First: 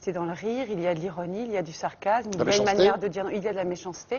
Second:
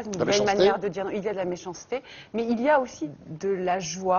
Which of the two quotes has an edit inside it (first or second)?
second